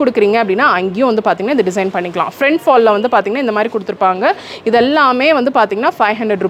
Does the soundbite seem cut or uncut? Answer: uncut